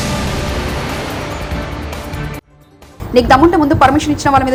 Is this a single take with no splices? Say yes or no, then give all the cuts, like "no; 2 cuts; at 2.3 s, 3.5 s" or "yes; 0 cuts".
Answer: yes; 0 cuts